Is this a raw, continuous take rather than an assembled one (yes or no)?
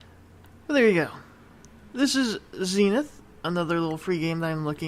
no